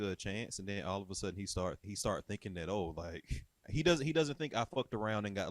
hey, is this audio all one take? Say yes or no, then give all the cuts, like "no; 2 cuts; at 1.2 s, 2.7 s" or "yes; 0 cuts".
no; 2 cuts; at 1.8 s, 3.7 s